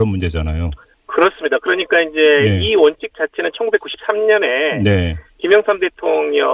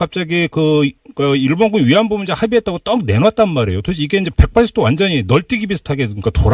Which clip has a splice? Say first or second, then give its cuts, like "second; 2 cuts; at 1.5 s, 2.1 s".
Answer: first; 1 cut; at 4.8 s